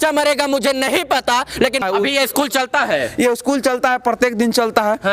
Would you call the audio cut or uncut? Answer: cut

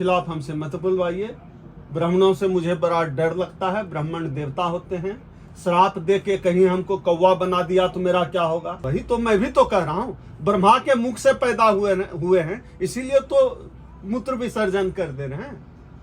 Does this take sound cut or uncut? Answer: cut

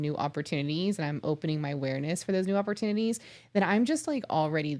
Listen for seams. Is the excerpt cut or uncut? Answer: uncut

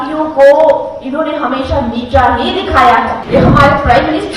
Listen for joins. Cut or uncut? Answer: cut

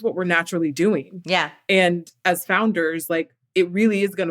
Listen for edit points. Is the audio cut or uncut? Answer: cut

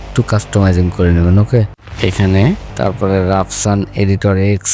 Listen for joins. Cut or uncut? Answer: cut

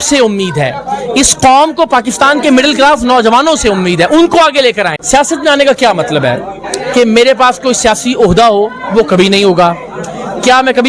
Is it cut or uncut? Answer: cut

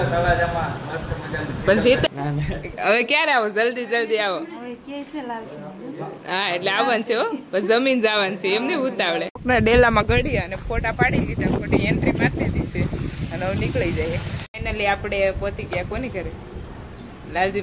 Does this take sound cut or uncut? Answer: cut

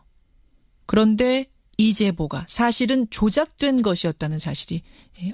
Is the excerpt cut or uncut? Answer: uncut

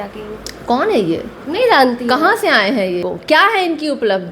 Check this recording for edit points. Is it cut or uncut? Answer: cut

